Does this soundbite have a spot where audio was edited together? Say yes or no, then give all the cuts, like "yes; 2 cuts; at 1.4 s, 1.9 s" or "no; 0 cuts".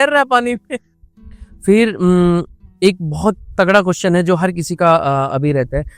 yes; 1 cut; at 0.9 s